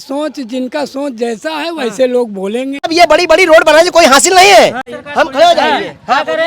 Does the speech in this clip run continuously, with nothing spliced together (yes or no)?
no